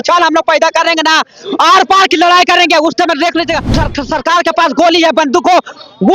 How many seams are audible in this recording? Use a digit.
1